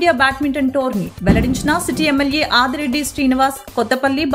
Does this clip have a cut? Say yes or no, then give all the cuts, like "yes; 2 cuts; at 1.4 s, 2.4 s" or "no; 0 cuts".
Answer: no; 0 cuts